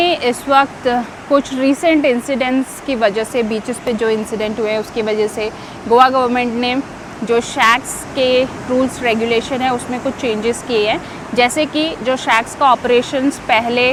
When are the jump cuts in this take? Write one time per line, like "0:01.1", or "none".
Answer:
none